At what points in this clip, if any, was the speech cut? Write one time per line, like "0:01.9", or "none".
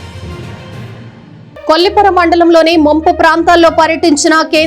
0:01.5